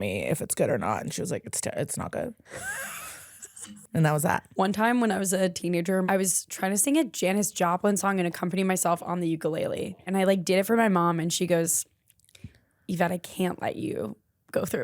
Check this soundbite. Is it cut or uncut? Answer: cut